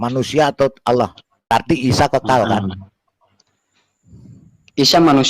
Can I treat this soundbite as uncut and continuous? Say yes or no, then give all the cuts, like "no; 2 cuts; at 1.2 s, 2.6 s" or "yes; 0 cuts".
no; 1 cut; at 1.5 s